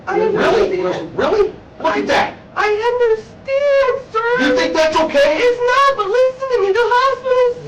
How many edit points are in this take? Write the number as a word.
zero